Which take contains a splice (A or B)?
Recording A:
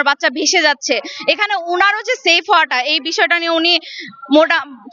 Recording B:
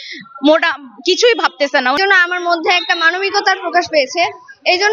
B